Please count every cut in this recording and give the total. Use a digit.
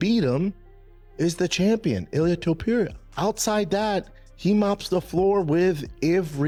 0